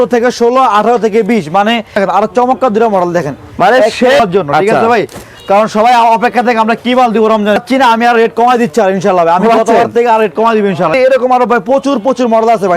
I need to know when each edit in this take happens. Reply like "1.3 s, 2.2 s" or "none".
2.0 s, 4.2 s, 7.6 s, 10.9 s